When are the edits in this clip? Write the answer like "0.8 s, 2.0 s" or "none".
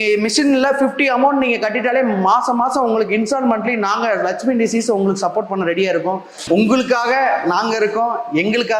6.4 s